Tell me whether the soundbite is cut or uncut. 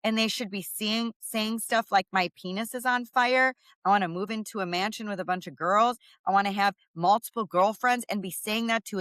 uncut